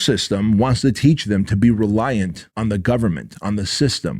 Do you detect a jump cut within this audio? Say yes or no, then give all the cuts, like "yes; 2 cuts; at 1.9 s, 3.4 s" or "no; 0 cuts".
yes; 1 cut; at 2.4 s